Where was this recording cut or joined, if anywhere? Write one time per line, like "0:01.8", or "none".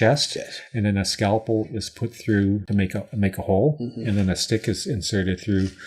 0:02.6

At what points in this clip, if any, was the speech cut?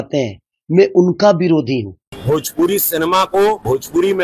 0:02.0

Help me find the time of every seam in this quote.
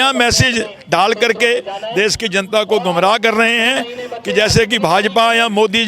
none

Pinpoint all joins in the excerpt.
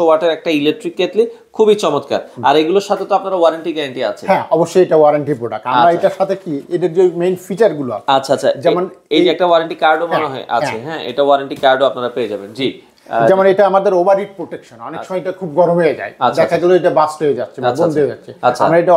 none

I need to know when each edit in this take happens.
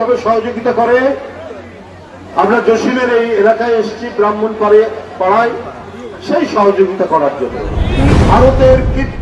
0:08.1

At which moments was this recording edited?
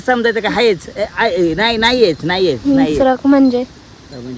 0:02.6

